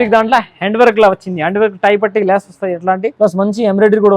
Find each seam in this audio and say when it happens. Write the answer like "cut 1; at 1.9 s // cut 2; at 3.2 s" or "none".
cut 1; at 3.1 s